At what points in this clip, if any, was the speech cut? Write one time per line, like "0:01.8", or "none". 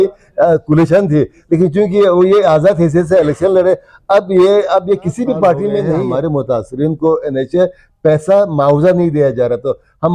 0:06.0

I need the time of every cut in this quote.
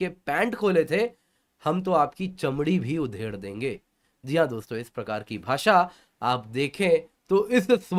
none

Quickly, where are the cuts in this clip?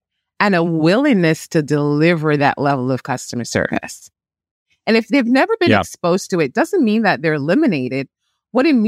0:04.7

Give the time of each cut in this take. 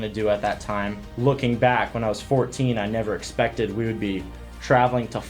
0:01.0

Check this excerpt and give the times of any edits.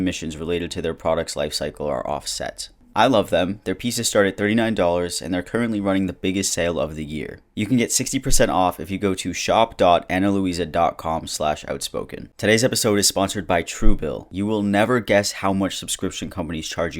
0:02.7
0:12.2

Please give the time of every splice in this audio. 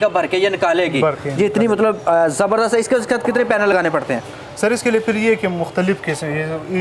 none

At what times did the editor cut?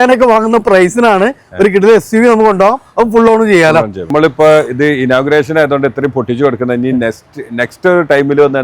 0:04.1

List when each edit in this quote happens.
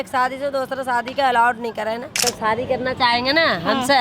0:02.2

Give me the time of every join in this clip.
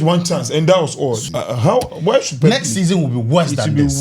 0:01.2

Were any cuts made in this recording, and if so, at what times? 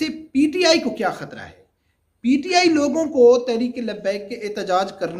none

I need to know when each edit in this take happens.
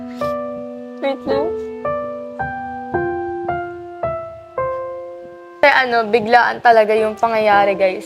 0:05.6

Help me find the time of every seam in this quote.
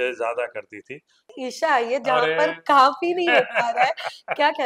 0:01.3

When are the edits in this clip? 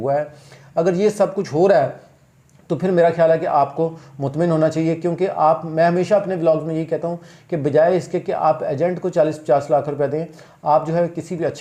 none

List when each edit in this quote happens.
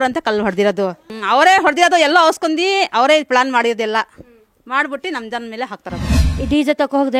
0:01.1
0:06.3

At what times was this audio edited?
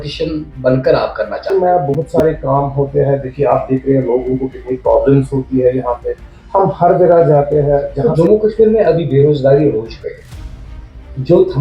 0:01.5
0:08.0

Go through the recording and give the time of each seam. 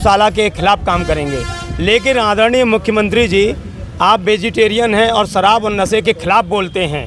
none

